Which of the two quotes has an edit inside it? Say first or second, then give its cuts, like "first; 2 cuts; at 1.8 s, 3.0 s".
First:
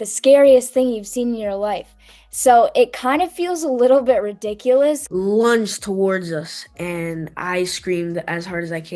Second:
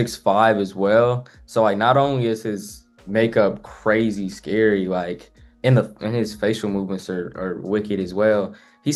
first; 1 cut; at 5.0 s